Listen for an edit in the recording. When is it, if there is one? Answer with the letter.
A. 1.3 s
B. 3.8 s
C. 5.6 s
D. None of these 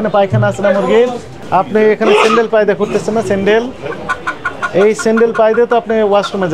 A